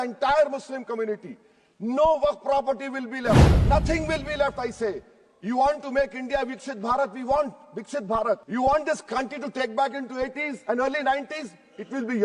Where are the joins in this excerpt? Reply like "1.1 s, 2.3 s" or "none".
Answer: 3.5 s, 8.4 s